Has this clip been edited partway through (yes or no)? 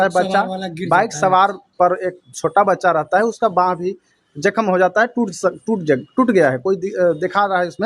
no